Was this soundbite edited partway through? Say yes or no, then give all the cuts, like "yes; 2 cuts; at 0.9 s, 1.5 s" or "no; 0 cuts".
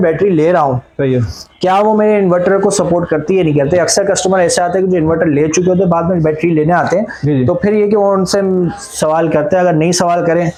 no; 0 cuts